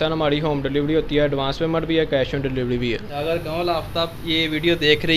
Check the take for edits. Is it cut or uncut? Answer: cut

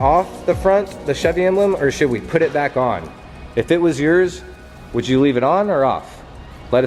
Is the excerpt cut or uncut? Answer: uncut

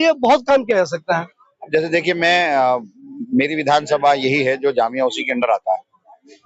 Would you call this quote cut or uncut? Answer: uncut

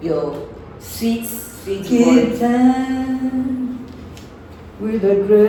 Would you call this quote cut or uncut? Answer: uncut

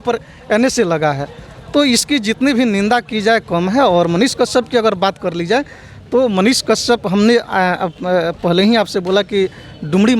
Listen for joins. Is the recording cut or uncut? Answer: uncut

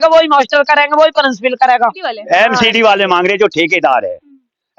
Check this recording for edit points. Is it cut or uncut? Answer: cut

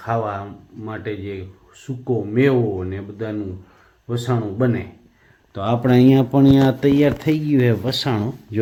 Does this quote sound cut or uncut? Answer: uncut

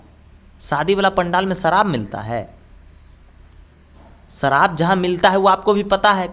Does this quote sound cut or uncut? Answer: uncut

